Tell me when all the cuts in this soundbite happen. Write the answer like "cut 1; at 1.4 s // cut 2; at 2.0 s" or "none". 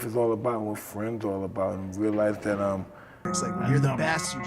cut 1; at 3.3 s